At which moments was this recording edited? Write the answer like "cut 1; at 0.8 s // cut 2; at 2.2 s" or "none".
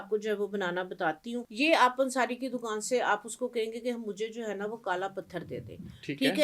cut 1; at 1.4 s